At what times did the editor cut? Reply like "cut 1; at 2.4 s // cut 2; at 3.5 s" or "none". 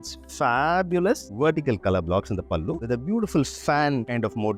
cut 1; at 1.3 s

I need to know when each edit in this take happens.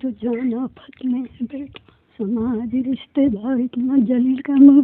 cut 1; at 2.1 s

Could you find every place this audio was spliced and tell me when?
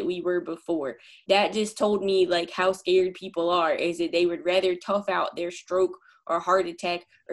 cut 1; at 1.1 s

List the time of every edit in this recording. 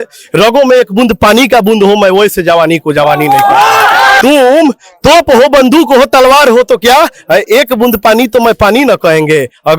cut 1; at 4.2 s

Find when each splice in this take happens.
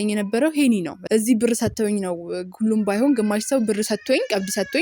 cut 1; at 0.9 s

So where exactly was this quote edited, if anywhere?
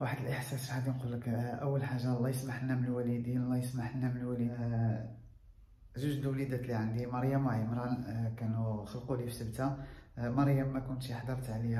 cut 1; at 4.5 s

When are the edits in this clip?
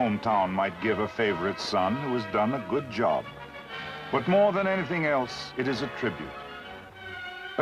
none

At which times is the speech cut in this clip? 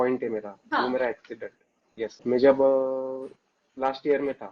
cut 1; at 2.2 s

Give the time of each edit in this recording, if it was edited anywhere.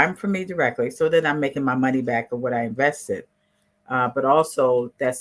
none

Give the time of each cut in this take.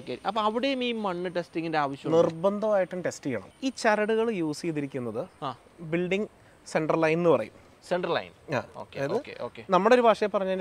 cut 1; at 3.5 s

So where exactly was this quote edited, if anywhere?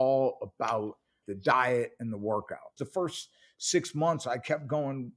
cut 1; at 1.2 s // cut 2; at 2.7 s

